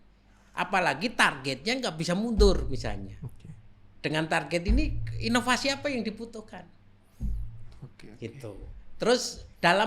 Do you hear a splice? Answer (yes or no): no